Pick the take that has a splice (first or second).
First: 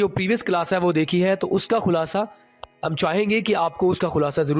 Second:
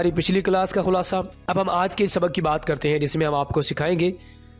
second